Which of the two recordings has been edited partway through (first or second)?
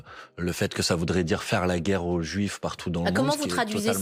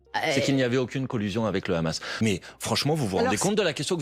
second